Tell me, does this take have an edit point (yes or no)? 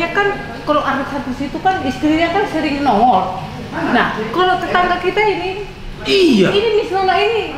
no